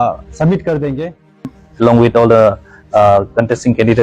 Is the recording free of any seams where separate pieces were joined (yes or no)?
no